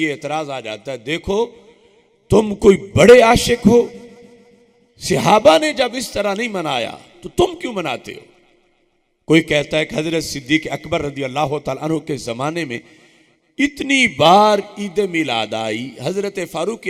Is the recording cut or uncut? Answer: uncut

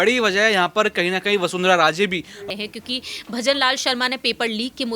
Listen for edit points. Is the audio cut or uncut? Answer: cut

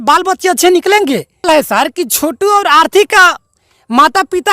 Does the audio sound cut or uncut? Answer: cut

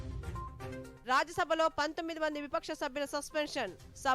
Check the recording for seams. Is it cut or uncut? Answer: cut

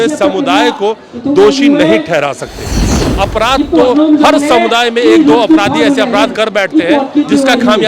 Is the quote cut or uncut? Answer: cut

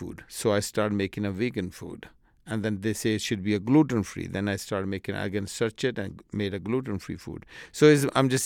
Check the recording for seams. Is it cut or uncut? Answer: uncut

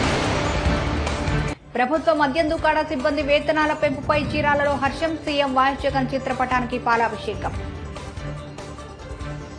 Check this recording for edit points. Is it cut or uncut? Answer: cut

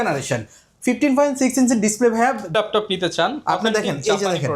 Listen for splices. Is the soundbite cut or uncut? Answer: cut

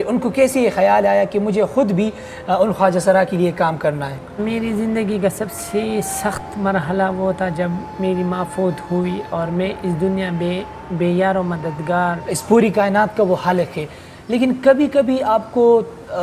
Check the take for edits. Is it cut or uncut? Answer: cut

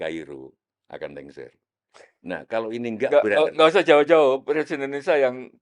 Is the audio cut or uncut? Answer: uncut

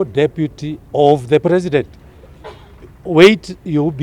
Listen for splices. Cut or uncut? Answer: uncut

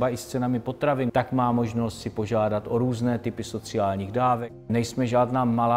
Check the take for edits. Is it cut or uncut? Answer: cut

